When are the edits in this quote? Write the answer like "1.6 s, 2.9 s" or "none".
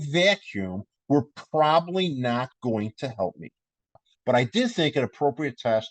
4.1 s